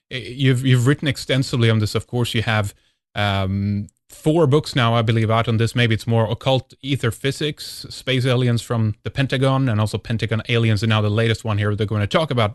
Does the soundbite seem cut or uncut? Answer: uncut